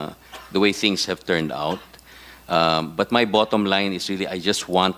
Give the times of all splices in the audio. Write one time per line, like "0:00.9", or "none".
none